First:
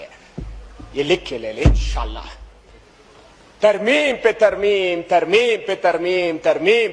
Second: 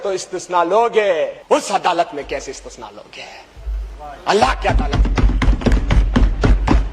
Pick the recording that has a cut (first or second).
second